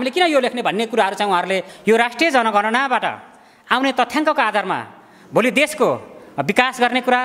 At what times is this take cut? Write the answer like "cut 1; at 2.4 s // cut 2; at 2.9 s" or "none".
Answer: cut 1; at 1.7 s